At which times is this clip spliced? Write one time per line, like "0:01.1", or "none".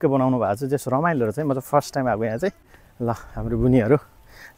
0:02.6